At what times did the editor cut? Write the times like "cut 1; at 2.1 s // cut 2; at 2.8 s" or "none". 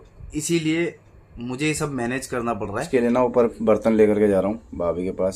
cut 1; at 2.8 s